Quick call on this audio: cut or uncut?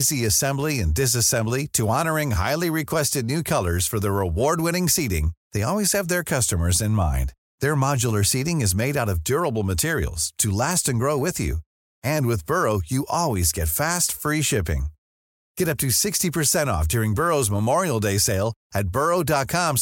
uncut